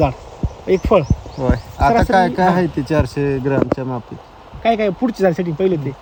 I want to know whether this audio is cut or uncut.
uncut